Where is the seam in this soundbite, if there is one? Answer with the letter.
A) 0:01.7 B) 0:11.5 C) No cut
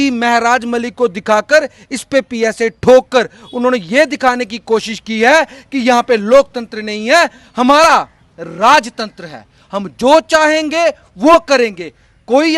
C